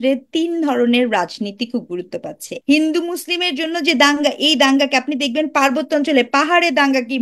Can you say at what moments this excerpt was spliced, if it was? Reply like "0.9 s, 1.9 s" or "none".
2.5 s